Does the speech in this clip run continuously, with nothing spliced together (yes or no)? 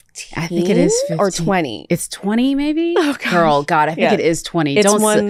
yes